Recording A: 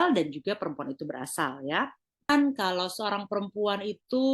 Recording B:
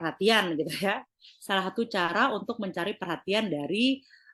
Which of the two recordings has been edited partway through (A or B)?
A